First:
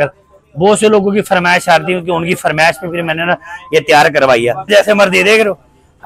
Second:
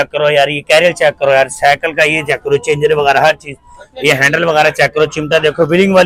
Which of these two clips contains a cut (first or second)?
first